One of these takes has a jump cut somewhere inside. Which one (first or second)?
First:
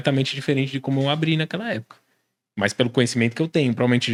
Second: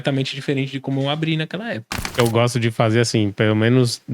second